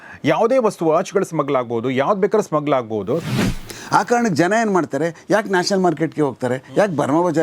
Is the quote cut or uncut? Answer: cut